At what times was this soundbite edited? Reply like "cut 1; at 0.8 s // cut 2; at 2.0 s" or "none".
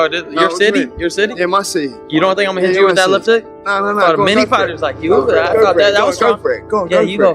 cut 1; at 6.1 s